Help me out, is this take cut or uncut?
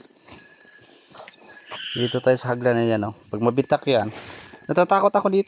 cut